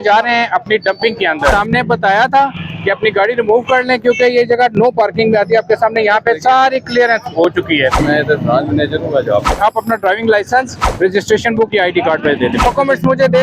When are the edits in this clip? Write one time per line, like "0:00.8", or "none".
0:01.5
0:08.0
0:09.6
0:10.8
0:12.7